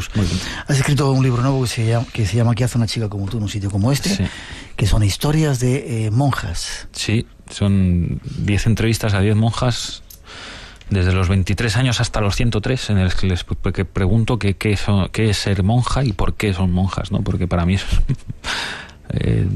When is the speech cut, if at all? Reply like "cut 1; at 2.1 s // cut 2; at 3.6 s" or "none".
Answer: cut 1; at 1.7 s